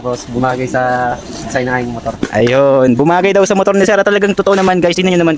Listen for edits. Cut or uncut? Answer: uncut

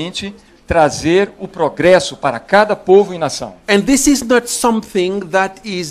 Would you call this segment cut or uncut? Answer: cut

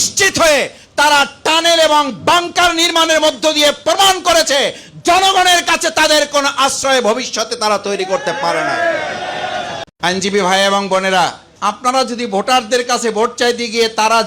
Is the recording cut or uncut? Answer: cut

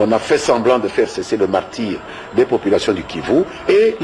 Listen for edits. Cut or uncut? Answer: cut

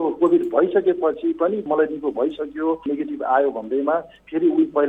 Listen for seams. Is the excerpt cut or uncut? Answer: cut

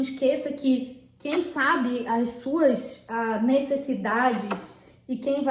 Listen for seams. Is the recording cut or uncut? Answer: uncut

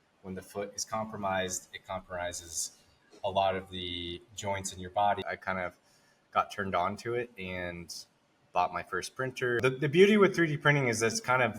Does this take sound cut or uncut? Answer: cut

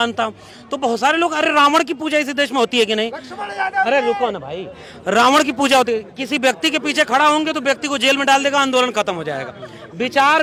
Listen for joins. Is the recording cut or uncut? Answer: uncut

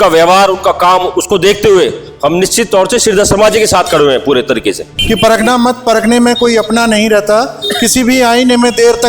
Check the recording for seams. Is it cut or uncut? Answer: cut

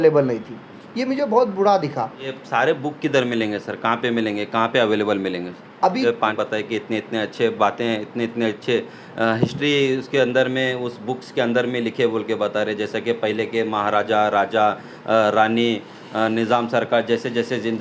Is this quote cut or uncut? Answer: cut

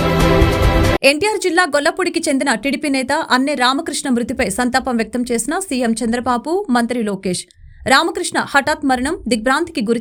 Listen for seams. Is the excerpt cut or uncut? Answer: uncut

